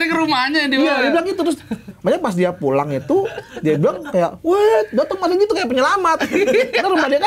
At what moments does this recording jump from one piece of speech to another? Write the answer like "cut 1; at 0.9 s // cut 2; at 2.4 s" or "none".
none